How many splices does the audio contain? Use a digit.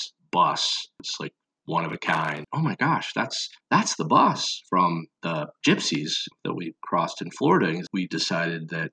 3